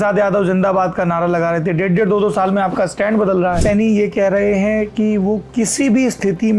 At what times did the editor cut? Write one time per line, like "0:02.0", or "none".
0:03.6